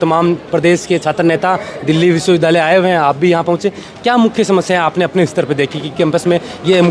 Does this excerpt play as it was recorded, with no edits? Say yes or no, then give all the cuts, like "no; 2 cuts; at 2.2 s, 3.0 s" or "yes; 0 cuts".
yes; 0 cuts